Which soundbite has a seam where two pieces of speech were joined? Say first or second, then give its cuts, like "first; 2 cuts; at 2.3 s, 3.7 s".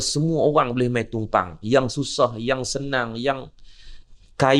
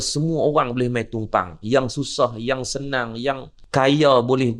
second; 1 cut; at 3.5 s